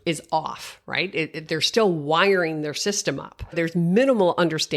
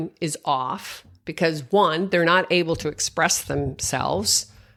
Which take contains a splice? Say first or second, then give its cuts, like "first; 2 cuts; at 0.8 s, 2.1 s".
first; 1 cut; at 3.3 s